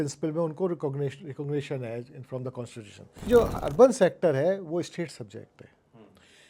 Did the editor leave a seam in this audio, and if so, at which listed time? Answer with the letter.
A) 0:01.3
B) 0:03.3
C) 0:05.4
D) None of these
B